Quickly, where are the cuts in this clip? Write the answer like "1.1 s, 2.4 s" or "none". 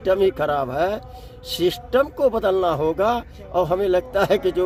none